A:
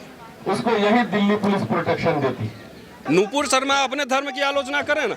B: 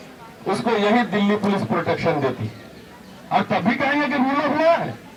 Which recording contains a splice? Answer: A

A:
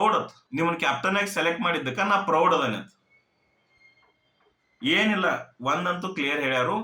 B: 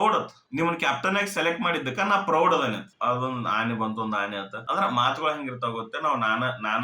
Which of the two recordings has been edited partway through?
B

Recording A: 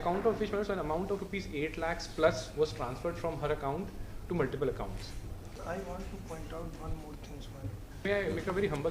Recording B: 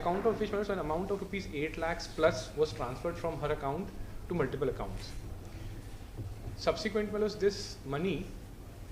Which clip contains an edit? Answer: A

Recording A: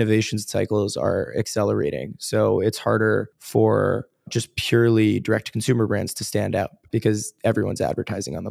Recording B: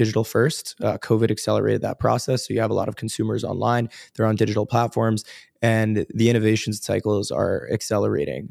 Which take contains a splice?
A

